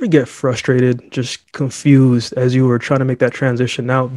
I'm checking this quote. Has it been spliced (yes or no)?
no